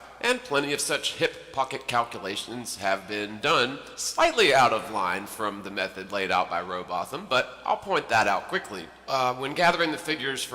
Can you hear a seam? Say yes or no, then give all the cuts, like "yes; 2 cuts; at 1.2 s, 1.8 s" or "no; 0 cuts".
yes; 1 cut; at 9.2 s